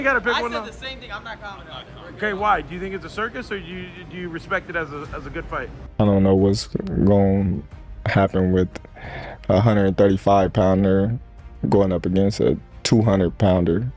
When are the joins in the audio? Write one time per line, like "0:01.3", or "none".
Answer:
0:05.9